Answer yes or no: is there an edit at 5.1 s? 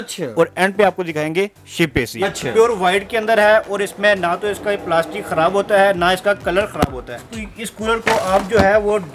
no